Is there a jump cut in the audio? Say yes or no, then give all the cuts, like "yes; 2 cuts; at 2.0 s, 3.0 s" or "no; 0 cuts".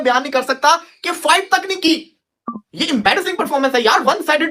yes; 1 cut; at 2.3 s